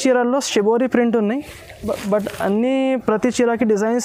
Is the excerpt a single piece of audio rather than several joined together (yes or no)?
yes